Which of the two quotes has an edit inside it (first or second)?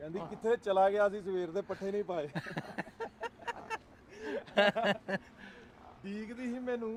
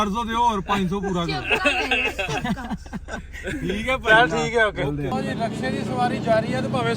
second